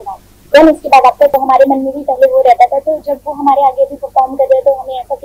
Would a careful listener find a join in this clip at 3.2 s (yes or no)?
no